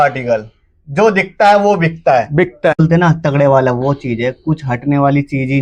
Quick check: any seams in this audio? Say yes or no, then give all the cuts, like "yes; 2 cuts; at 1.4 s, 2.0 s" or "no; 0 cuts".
yes; 1 cut; at 2.8 s